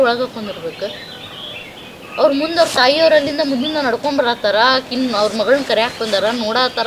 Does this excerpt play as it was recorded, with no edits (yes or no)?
yes